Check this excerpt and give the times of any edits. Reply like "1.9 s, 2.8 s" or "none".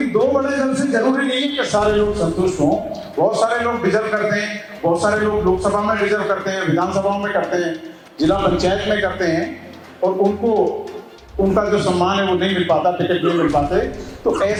none